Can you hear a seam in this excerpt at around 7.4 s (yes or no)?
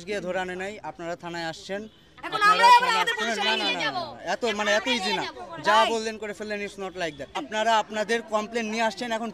yes